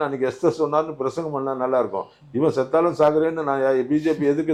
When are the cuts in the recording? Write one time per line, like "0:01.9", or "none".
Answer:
none